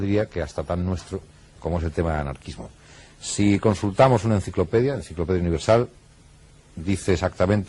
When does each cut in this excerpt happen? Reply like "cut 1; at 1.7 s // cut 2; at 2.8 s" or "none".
cut 1; at 5.6 s